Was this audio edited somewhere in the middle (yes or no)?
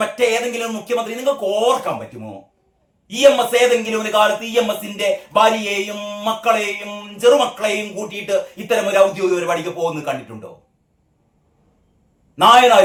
no